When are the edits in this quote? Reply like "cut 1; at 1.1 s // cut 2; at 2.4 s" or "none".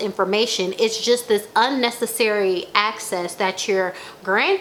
none